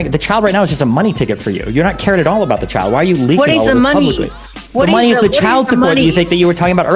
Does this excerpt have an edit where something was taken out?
no; 0 cuts

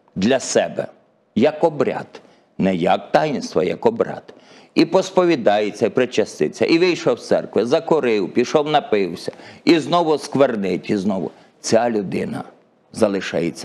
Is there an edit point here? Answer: no; 0 cuts

